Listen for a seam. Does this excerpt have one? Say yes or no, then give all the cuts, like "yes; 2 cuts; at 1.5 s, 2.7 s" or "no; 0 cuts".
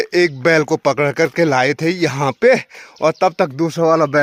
no; 0 cuts